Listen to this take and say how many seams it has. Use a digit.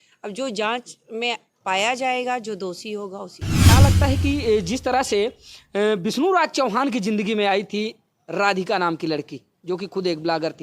1